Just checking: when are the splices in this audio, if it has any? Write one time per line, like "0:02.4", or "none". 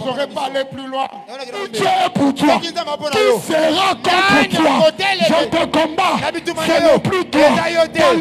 0:01.7
0:05.4